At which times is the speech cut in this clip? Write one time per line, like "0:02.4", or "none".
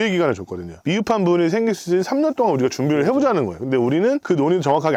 none